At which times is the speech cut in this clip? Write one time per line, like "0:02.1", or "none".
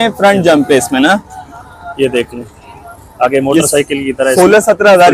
none

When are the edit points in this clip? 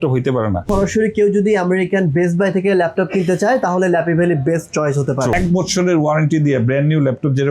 0:00.8
0:05.3

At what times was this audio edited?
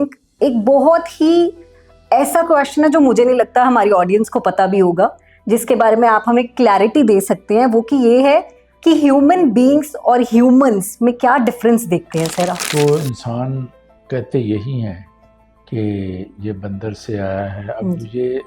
0:12.6

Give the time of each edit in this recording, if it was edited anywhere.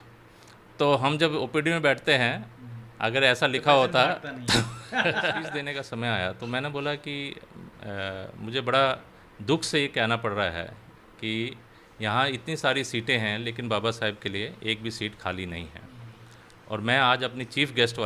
0:05.6

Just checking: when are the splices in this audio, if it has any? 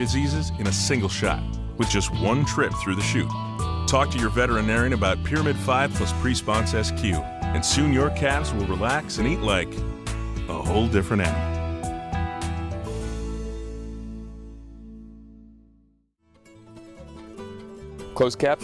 0:16.4
0:17.7

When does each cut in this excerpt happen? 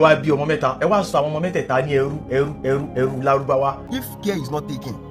0:03.9

